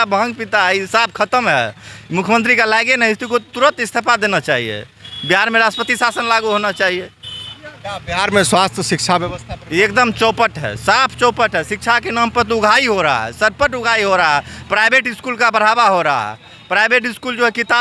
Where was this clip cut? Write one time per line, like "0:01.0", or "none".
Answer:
none